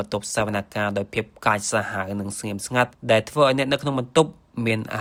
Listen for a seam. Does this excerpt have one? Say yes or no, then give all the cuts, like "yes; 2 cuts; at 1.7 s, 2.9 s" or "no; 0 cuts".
no; 0 cuts